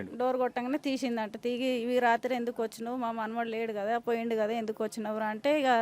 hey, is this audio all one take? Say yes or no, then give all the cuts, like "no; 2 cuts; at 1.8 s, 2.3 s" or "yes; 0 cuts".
yes; 0 cuts